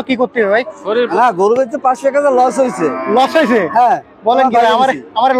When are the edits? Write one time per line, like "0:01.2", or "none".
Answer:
0:01.1